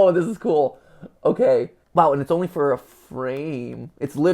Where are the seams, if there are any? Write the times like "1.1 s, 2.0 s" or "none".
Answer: 1.8 s